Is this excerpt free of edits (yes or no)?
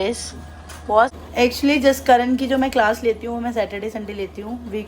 no